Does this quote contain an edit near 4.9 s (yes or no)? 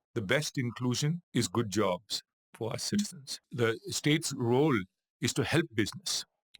no